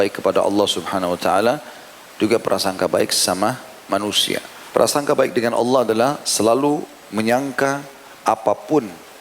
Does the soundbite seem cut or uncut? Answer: cut